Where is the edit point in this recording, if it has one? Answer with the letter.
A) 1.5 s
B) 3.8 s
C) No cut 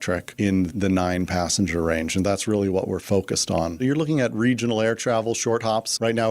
B